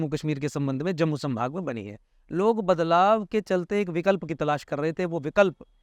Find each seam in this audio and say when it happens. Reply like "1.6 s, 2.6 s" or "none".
none